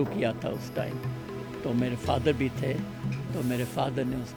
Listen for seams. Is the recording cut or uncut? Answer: uncut